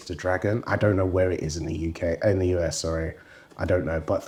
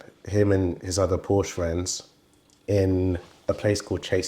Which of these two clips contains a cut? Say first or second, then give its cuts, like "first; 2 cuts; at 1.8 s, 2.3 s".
second; 1 cut; at 3.3 s